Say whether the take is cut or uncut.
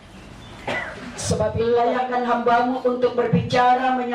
cut